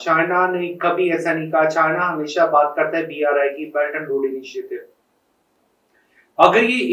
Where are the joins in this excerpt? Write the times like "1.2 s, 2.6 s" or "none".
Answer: none